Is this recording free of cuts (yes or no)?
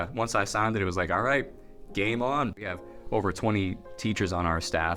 no